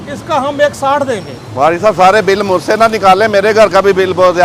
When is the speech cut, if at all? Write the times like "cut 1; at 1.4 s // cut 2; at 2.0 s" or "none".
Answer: none